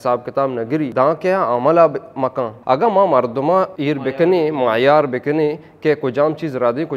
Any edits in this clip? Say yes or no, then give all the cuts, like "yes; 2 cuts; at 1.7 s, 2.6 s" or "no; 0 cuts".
yes; 3 cuts; at 0.9 s, 2.5 s, 3.7 s